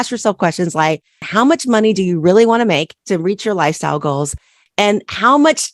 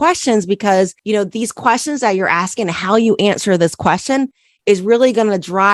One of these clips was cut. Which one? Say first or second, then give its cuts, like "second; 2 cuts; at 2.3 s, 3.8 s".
first; 2 cuts; at 1.3 s, 2.9 s